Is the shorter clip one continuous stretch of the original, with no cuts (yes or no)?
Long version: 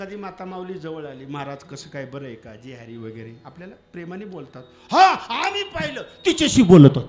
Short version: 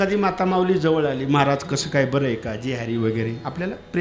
yes